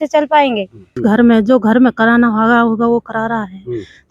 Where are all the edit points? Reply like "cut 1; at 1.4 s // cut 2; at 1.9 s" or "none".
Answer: cut 1; at 0.9 s

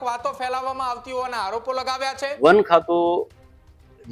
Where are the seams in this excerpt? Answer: cut 1; at 2.3 s

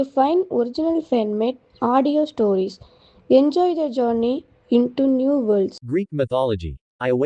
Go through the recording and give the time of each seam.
cut 1; at 5.8 s

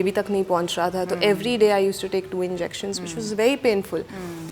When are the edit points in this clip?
none

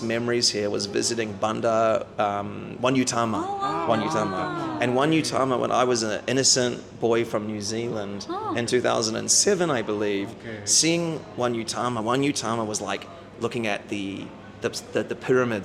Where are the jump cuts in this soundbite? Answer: none

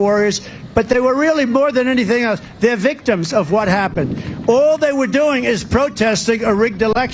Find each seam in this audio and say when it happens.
none

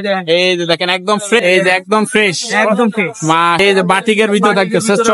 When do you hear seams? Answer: cut 1; at 1.4 s // cut 2; at 3.6 s

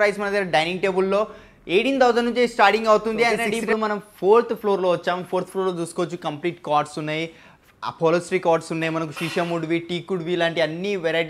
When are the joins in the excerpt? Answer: cut 1; at 4.0 s

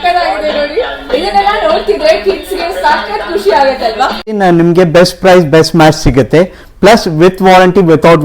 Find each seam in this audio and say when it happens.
cut 1; at 4.3 s

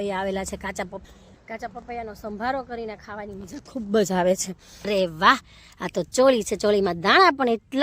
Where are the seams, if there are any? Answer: cut 1; at 1.0 s // cut 2; at 4.9 s

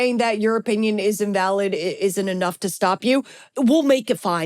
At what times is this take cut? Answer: cut 1; at 3.5 s

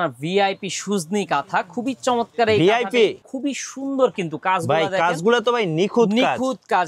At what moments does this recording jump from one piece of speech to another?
cut 1; at 3.3 s

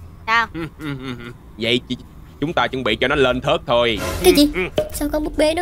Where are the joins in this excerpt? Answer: cut 1; at 4.6 s

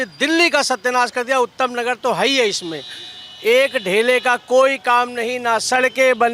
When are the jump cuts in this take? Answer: none

